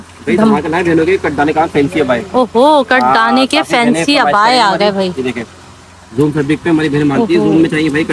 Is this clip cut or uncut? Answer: uncut